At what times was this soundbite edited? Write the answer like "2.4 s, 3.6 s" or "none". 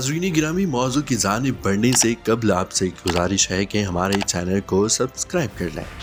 none